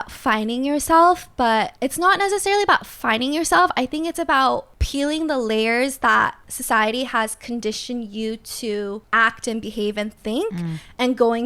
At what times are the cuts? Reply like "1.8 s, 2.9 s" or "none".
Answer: 1.7 s, 4.8 s, 6.5 s, 9.0 s